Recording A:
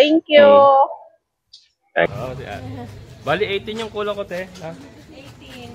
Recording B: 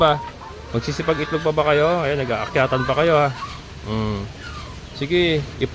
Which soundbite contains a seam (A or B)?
A